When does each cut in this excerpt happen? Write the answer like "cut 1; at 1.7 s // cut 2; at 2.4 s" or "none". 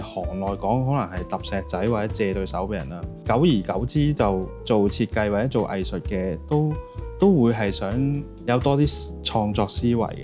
cut 1; at 3.2 s // cut 2; at 4.5 s // cut 3; at 8.3 s

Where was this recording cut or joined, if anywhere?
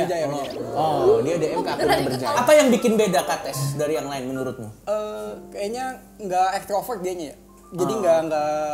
cut 1; at 2.3 s // cut 2; at 4.7 s

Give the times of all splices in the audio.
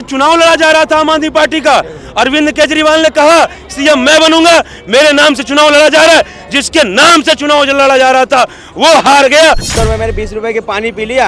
cut 1; at 9.7 s

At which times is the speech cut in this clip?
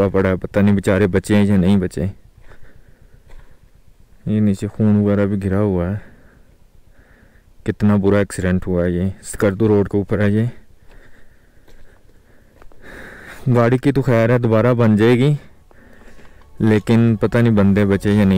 none

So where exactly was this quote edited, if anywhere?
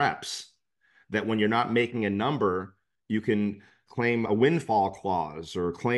cut 1; at 3.8 s

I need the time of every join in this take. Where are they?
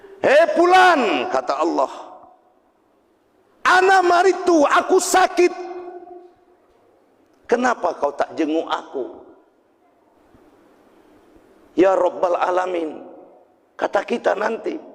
cut 1; at 3.6 s // cut 2; at 10.2 s

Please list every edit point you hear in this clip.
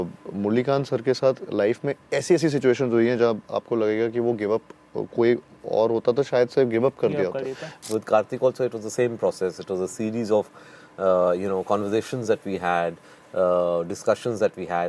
cut 1; at 7.7 s

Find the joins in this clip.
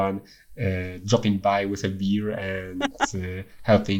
none

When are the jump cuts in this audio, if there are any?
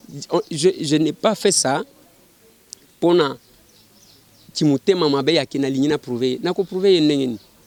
none

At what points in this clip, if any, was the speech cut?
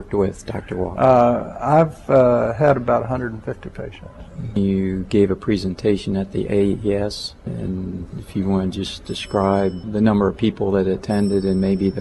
none

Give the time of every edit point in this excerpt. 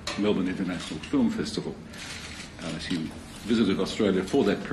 cut 1; at 2.6 s

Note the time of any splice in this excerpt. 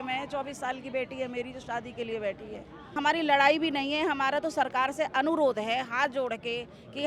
cut 1; at 2.8 s

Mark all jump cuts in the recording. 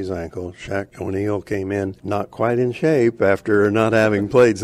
cut 1; at 0.9 s // cut 2; at 2.0 s

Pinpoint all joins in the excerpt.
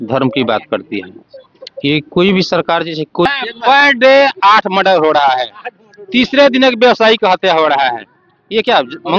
cut 1; at 3.2 s

